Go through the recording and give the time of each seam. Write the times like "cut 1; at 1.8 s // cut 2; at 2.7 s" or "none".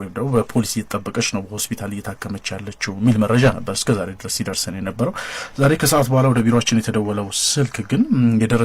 cut 1; at 3.3 s